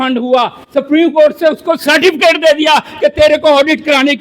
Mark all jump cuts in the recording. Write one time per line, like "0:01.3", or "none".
none